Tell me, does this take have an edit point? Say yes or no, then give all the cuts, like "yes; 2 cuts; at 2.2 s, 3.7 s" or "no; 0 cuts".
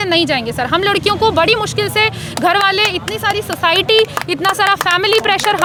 no; 0 cuts